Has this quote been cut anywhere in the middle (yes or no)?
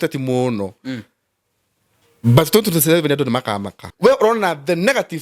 yes